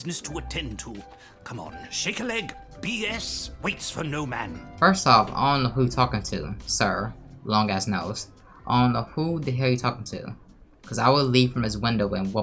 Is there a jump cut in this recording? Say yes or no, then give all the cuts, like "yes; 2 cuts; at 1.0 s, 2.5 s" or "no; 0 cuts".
no; 0 cuts